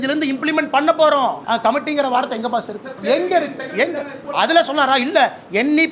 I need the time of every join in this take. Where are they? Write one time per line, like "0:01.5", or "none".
0:01.4
0:02.9
0:04.2